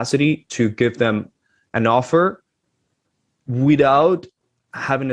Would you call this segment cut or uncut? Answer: uncut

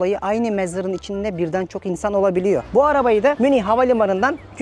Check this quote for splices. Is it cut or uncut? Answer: cut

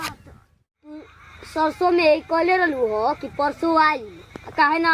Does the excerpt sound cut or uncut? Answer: cut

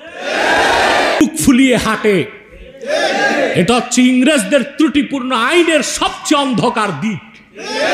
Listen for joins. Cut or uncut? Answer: cut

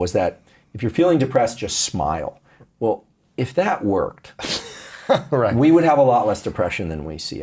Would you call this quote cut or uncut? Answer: uncut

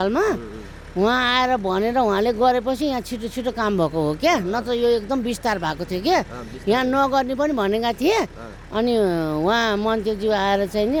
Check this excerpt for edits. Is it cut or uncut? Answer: uncut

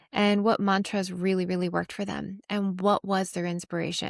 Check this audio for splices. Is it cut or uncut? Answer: uncut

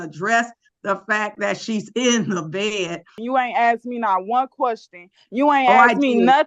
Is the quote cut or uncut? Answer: cut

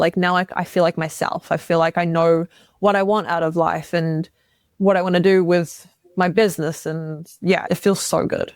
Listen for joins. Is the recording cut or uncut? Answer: cut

